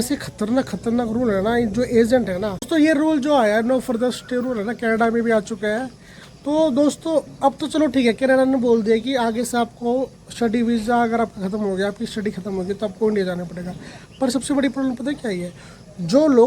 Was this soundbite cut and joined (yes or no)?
yes